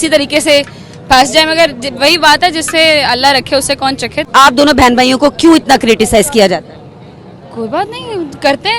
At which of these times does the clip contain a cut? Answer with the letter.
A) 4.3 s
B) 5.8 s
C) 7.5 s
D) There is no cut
A